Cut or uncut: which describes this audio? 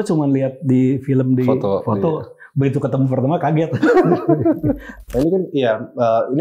cut